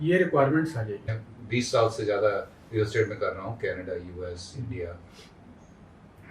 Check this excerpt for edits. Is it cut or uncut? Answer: cut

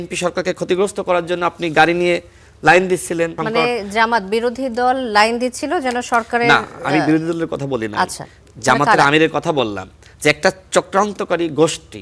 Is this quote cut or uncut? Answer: cut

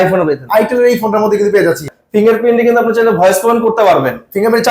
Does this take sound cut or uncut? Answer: cut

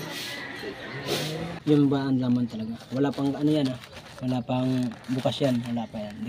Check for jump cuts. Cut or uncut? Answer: cut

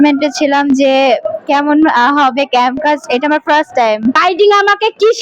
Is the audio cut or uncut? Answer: cut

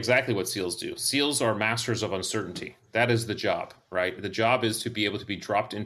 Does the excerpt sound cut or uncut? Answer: uncut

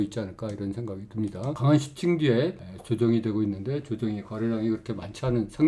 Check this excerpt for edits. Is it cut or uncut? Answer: cut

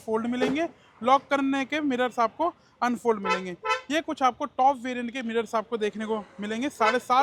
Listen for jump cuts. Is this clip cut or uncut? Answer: uncut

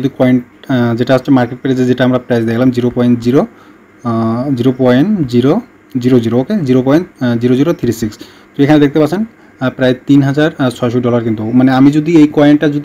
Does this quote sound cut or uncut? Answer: uncut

